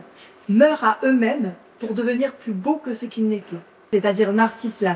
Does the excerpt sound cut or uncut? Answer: cut